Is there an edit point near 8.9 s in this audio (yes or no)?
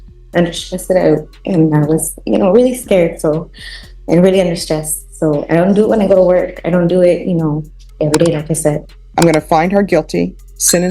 yes